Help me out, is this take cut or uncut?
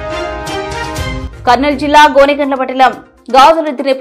cut